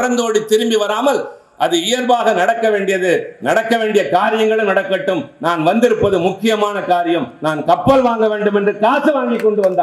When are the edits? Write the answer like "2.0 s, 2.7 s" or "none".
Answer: none